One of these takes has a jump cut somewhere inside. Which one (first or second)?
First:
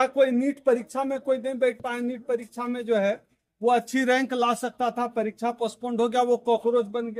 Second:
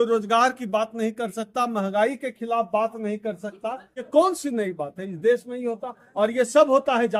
second